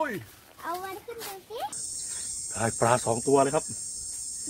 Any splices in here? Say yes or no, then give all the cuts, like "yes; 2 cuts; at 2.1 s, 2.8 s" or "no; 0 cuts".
yes; 1 cut; at 1.8 s